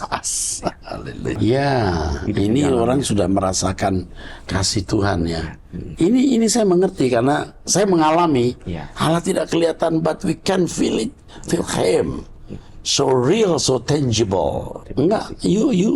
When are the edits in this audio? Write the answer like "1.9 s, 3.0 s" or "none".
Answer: 1.4 s, 14.8 s